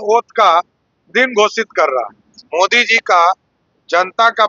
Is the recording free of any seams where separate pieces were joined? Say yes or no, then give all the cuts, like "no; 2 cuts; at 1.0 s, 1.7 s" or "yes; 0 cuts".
no; 1 cut; at 2.4 s